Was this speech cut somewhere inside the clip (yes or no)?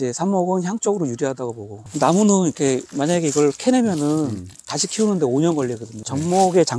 yes